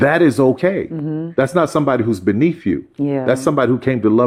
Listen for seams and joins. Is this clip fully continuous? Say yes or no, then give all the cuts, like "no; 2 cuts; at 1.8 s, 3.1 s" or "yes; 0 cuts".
yes; 0 cuts